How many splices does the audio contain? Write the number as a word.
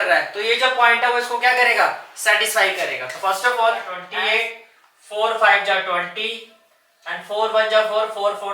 one